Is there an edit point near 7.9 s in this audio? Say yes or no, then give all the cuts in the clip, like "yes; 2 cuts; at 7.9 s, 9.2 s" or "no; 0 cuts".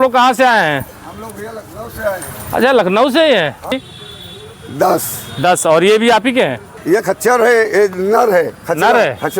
no; 2 cuts; at 3.7 s, 6.7 s